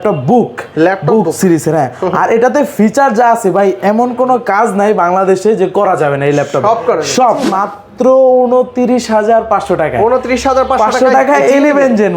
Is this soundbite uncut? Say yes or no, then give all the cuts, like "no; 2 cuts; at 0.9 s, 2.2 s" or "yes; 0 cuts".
no; 1 cut; at 7.5 s